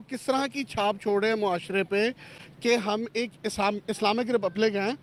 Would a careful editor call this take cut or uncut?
uncut